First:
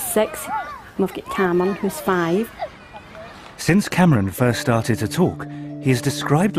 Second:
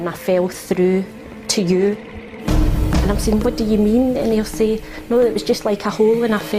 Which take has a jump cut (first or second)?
second